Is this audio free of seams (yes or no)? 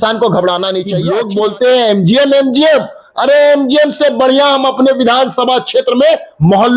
no